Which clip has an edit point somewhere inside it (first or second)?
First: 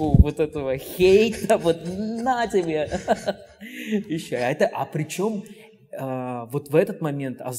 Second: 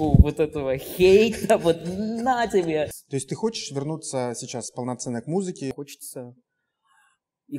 second